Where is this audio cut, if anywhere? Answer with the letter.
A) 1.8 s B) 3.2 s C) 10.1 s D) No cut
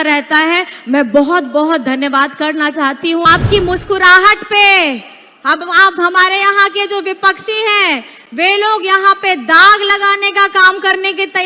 B